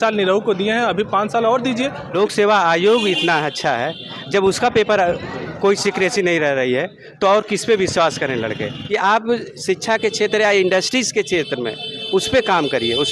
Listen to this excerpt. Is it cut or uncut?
cut